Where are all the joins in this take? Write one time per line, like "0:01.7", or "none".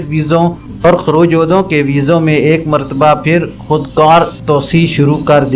0:04.4